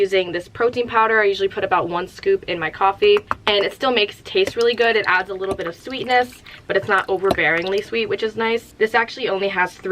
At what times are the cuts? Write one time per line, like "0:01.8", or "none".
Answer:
0:03.3